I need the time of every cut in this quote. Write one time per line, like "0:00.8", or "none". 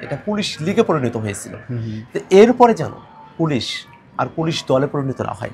none